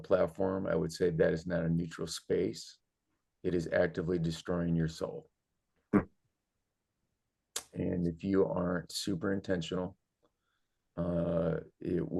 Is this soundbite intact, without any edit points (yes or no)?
yes